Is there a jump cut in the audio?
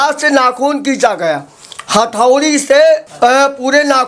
yes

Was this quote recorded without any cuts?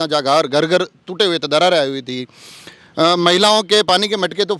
yes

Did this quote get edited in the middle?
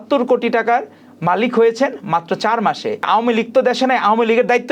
yes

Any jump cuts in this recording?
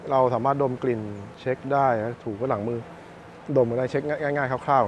yes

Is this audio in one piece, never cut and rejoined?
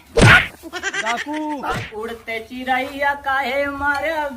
no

